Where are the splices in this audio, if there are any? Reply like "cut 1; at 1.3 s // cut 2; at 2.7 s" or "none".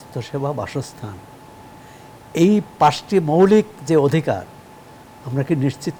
none

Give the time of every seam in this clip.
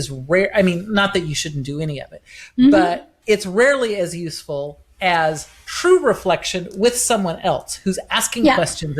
none

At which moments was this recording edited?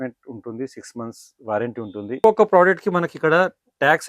cut 1; at 2.2 s

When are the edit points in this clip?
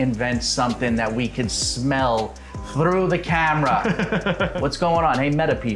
cut 1; at 4.5 s

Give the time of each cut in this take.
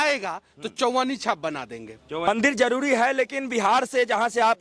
cut 1; at 2.3 s

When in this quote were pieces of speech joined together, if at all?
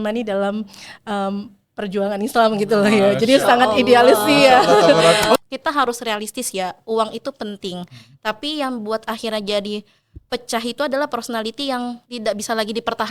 cut 1; at 5.4 s // cut 2; at 12.1 s

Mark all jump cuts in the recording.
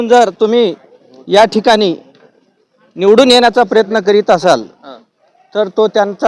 none

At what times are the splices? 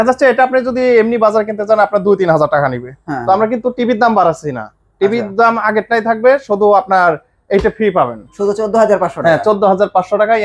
cut 1; at 8.2 s

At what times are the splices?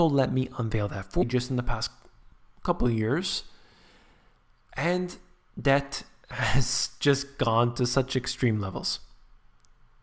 none

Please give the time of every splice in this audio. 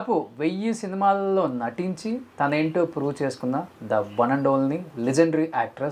none

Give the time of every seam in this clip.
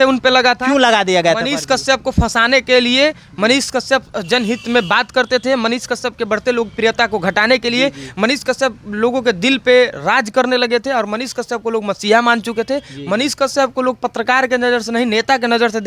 none

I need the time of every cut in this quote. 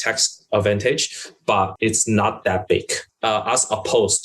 cut 1; at 1.7 s // cut 2; at 3.0 s

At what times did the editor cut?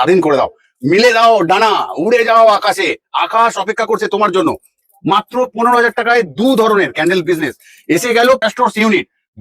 cut 1; at 8.4 s

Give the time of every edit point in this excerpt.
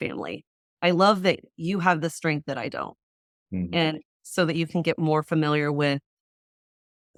none

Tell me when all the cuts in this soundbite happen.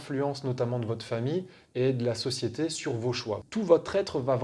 cut 1; at 3.4 s

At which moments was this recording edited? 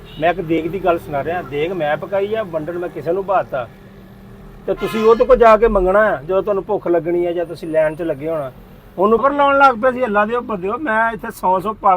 cut 1; at 9.2 s

